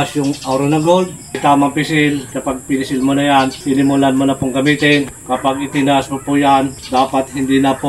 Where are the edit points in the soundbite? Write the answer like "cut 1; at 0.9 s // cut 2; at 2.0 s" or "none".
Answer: cut 1; at 1.4 s // cut 2; at 2.3 s // cut 3; at 3.6 s // cut 4; at 5.2 s // cut 5; at 6.8 s